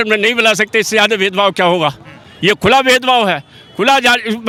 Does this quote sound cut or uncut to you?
uncut